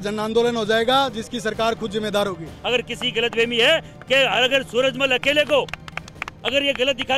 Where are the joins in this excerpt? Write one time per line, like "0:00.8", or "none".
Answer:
0:02.5